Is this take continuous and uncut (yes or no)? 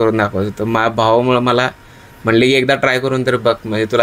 yes